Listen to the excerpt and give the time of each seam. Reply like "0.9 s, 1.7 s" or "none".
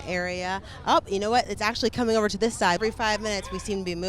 2.8 s